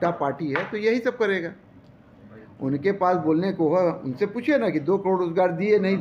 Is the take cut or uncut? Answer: uncut